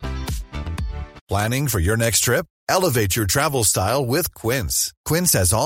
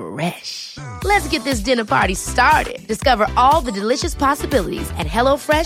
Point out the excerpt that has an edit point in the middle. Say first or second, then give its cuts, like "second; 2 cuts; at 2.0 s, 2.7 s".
first; 1 cut; at 1.2 s